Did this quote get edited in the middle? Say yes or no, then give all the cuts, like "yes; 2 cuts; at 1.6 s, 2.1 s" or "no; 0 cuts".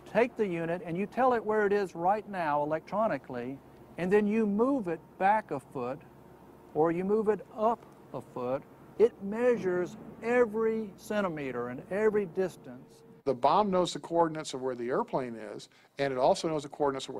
yes; 1 cut; at 1.4 s